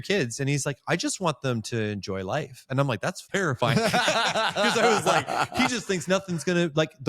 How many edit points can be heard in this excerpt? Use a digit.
1